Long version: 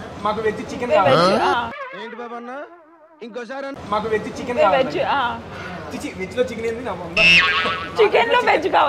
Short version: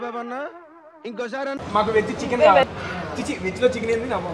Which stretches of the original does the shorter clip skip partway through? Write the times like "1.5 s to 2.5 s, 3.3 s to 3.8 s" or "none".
4.8 s to 5.4 s